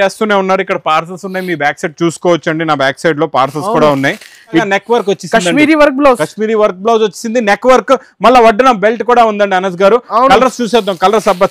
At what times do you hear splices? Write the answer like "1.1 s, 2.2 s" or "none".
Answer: 4.6 s